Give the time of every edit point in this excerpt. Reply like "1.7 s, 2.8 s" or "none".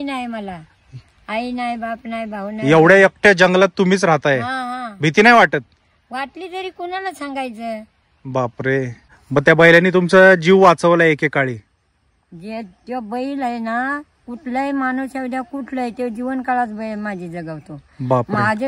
none